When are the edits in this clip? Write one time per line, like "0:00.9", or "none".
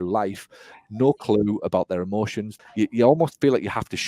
0:02.5